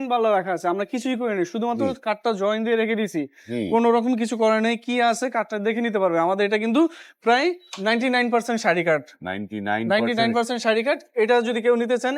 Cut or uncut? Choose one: uncut